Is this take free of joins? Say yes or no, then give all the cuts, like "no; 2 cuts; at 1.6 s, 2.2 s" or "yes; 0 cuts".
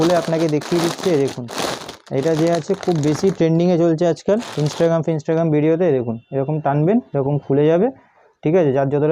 yes; 0 cuts